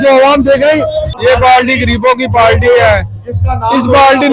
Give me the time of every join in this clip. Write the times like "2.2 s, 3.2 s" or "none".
1.1 s